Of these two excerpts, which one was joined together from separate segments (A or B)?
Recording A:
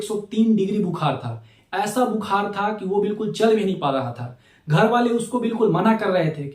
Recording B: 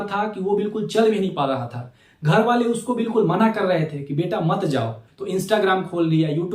B